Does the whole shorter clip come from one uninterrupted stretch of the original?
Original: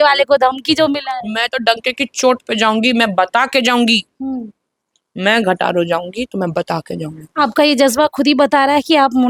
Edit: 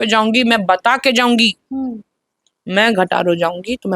yes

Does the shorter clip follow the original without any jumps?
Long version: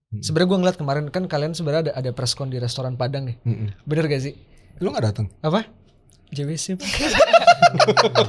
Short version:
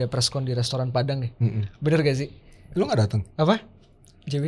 yes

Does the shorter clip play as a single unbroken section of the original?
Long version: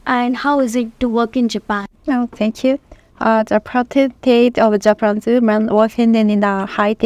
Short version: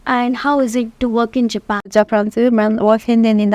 no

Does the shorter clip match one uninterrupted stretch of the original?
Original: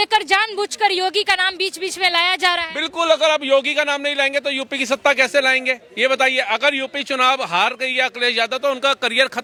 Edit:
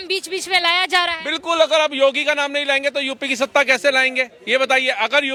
yes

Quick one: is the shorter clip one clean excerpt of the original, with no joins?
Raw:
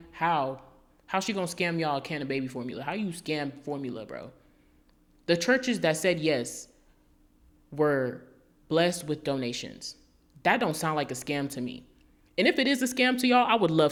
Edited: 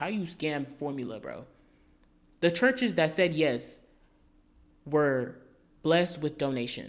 yes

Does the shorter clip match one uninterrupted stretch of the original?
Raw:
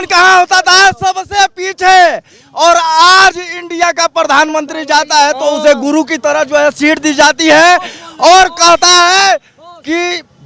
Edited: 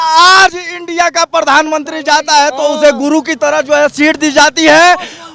yes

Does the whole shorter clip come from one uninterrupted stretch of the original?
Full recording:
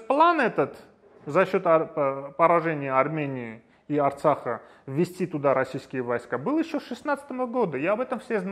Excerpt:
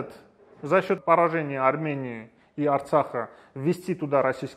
no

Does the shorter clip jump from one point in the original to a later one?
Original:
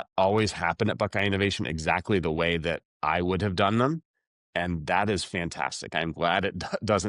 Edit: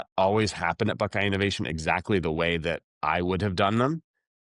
no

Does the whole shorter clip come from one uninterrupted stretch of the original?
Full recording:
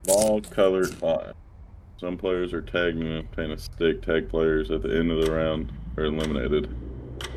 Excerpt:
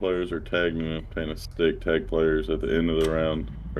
yes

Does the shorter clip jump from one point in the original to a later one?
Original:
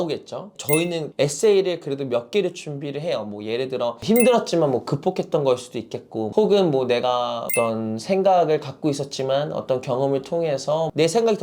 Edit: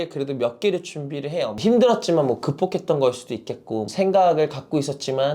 yes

